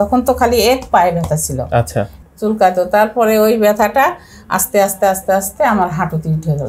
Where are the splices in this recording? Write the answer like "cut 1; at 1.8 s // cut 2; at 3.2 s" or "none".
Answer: cut 1; at 2.1 s